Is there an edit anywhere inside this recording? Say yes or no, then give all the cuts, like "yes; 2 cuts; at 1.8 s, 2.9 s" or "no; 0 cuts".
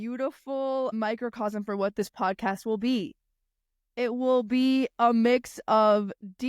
yes; 1 cut; at 0.9 s